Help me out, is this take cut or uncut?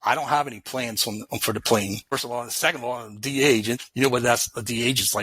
cut